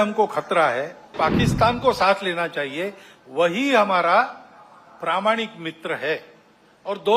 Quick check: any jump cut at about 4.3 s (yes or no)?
no